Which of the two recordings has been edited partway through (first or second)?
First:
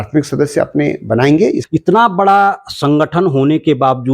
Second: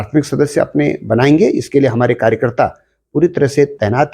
first